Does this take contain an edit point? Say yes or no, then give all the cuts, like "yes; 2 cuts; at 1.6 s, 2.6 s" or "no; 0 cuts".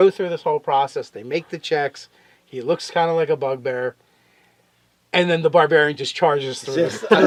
no; 0 cuts